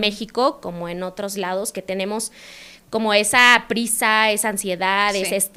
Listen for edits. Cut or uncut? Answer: uncut